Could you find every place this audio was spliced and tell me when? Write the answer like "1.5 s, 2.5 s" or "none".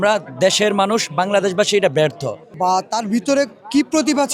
2.5 s